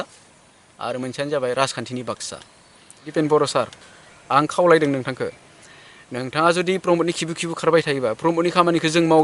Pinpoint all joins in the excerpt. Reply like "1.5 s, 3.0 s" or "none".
3.0 s

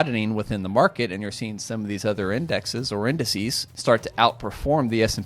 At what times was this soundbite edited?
3.7 s

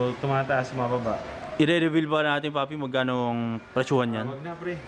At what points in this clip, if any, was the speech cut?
1.4 s

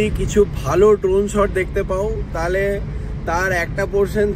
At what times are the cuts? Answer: none

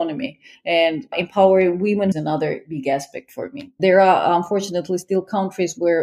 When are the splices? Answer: 2.1 s, 3.8 s

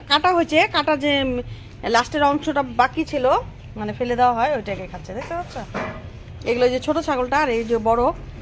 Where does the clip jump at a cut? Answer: none

